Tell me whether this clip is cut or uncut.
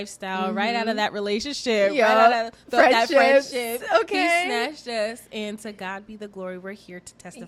uncut